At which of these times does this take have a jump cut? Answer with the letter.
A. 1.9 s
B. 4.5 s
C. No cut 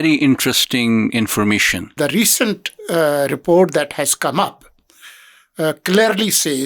A